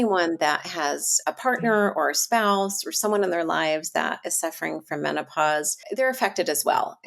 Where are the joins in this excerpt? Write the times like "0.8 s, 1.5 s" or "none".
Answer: 1.1 s, 5.8 s